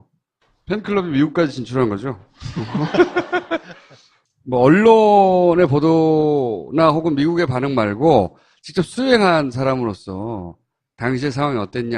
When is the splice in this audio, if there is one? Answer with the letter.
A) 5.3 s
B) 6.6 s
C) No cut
C